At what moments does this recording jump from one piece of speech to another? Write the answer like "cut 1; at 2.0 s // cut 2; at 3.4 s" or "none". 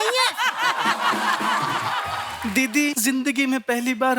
cut 1; at 2.0 s // cut 2; at 2.9 s